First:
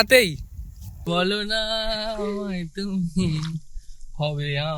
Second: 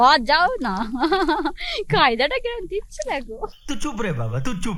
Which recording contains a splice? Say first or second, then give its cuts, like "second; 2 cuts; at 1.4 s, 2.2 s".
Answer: first; 1 cut; at 1.0 s